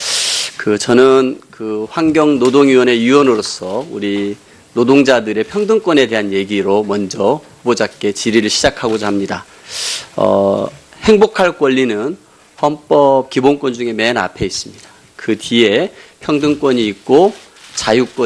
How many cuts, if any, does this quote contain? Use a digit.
1